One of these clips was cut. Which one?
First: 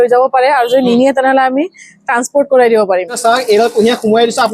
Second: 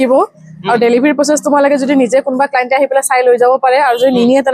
first; 1 cut; at 3.2 s

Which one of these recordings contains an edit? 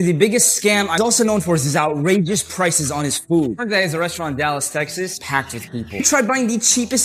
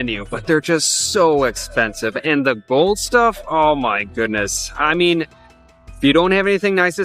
first; 2 cuts; at 1.0 s, 5.2 s

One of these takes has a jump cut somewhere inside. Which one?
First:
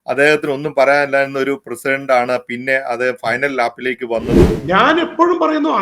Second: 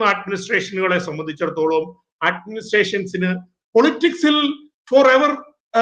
first; 1 cut; at 4.6 s

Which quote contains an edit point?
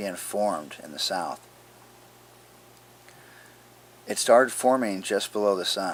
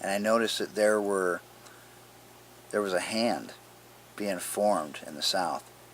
second; 1 cut; at 2.8 s

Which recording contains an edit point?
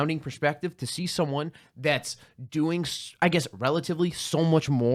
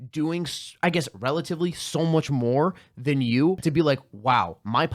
second; 1 cut; at 3.6 s

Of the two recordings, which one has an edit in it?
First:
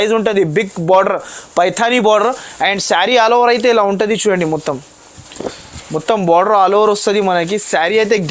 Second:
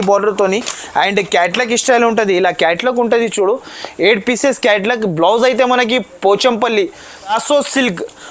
second; 1 cut; at 7.3 s

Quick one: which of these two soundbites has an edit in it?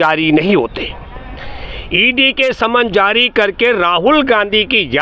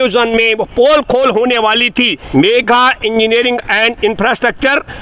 second; 1 cut; at 2.2 s

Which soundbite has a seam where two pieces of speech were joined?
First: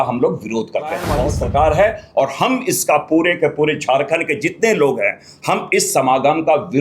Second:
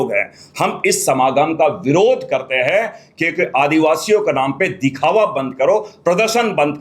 first; 1 cut; at 1.2 s

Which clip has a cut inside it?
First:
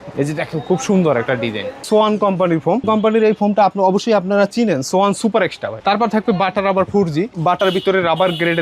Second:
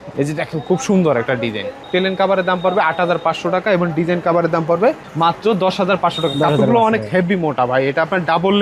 first; 4 cuts; at 1.8 s, 2.8 s, 5.7 s, 7.3 s

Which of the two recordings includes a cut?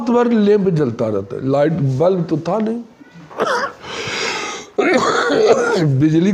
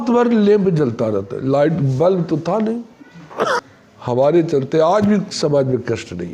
second; 1 cut; at 3.8 s

